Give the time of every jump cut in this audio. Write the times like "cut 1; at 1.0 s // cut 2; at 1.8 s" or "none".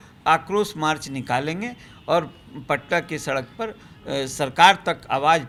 none